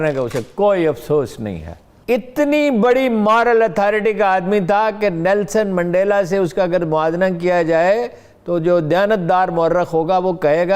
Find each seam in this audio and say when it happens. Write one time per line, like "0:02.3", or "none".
0:02.0

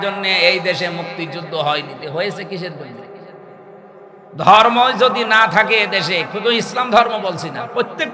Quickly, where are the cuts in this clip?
none

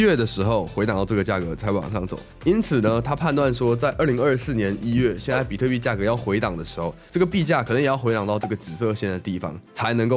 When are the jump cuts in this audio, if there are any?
0:02.2

